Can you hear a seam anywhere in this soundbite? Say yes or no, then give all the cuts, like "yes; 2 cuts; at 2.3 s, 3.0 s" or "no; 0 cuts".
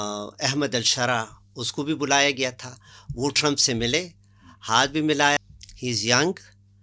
yes; 1 cut; at 5.4 s